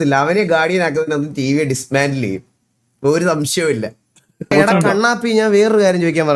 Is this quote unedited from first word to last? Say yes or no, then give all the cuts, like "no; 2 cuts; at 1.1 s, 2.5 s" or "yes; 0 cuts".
no; 1 cut; at 4.5 s